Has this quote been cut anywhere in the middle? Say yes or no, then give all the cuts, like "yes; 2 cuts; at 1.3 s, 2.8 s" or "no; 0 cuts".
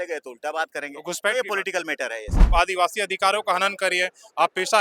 yes; 1 cut; at 2.5 s